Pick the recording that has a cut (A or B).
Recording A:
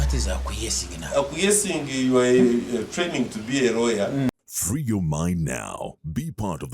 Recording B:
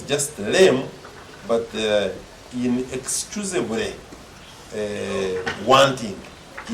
A